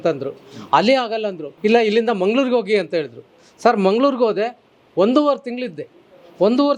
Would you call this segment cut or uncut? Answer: cut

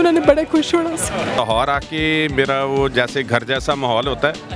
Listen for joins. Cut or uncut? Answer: cut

